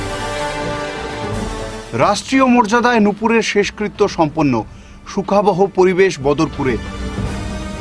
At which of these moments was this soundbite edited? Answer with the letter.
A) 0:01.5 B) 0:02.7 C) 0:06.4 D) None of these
A